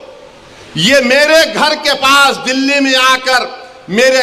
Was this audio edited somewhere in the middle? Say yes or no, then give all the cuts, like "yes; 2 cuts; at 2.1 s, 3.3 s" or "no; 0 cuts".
no; 0 cuts